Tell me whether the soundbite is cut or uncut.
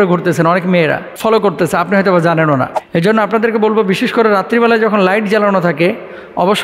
cut